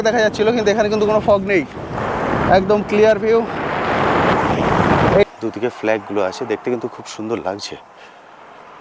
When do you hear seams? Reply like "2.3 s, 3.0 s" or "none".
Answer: 5.3 s